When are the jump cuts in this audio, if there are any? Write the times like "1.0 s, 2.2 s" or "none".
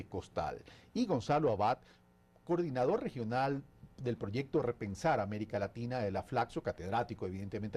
5.4 s